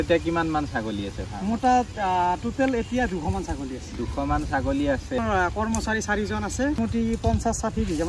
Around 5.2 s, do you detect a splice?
yes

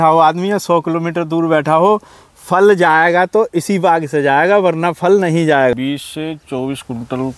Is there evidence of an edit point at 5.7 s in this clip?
yes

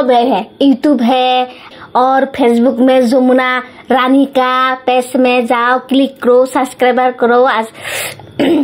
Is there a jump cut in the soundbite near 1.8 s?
yes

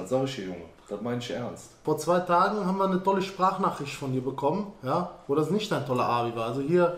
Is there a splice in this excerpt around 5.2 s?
no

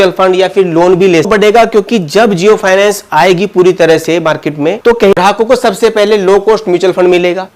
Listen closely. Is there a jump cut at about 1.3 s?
yes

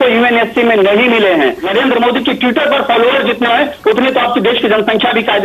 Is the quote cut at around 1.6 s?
yes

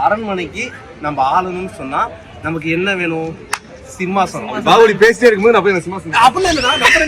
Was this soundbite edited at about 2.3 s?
no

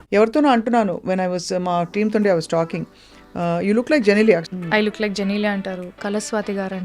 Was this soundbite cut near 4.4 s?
yes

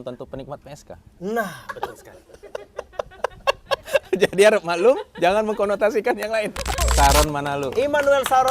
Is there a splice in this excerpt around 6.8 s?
yes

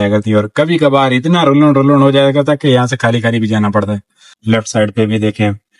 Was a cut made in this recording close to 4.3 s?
yes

